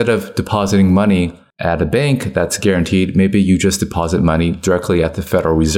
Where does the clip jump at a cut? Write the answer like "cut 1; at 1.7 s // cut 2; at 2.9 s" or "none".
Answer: none

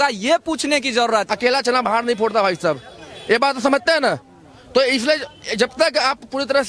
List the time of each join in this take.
cut 1; at 1.2 s

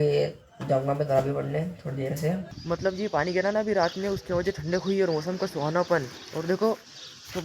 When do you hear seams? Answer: cut 1; at 2.5 s

